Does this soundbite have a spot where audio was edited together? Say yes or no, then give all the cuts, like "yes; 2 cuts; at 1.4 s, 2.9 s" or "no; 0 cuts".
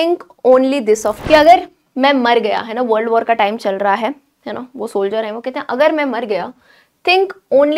yes; 1 cut; at 1.1 s